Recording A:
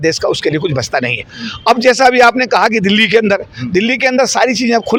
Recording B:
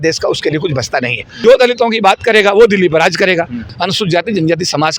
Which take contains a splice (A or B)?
B